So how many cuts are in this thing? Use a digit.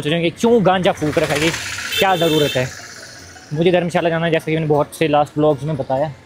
0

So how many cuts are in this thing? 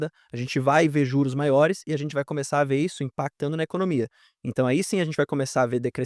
0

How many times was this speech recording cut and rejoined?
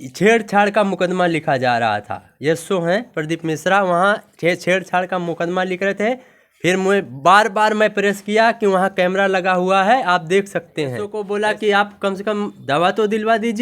1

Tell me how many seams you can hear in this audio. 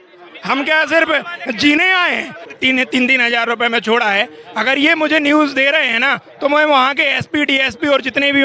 1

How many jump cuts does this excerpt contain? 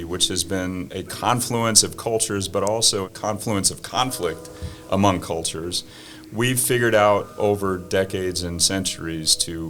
2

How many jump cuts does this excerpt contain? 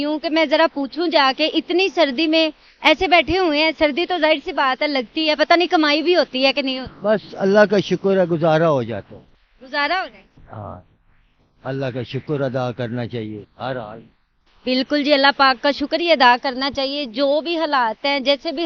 0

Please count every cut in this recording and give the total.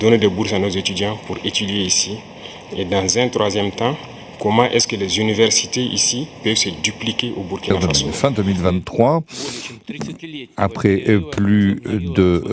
1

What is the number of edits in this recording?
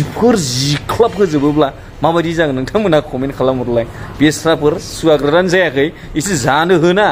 0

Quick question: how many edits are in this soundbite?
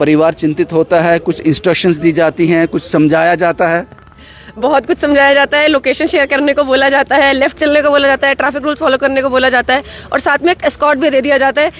0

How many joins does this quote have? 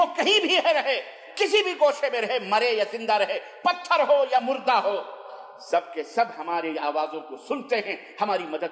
0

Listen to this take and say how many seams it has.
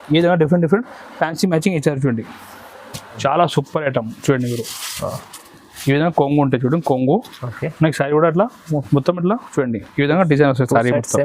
1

